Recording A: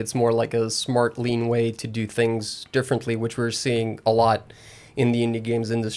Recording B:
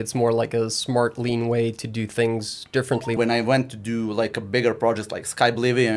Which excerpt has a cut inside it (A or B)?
B